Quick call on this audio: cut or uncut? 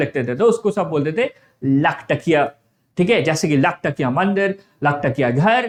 uncut